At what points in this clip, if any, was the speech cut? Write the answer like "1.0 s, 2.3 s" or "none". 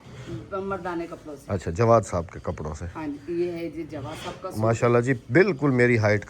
none